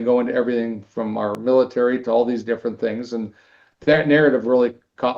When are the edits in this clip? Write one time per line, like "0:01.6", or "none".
0:01.4